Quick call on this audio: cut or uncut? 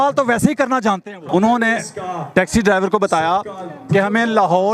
cut